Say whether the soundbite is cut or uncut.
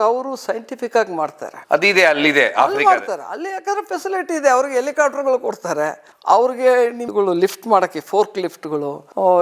cut